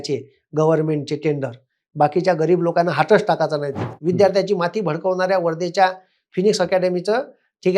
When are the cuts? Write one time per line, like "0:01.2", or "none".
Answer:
0:03.9